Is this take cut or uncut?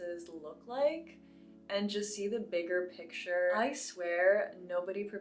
cut